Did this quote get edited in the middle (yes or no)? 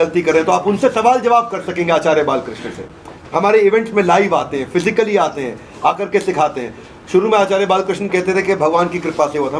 no